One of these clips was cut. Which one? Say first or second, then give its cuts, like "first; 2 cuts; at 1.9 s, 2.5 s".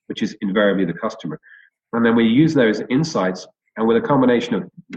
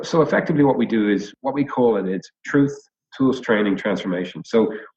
second; 1 cut; at 1.3 s